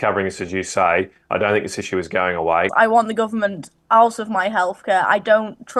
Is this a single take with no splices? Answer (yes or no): no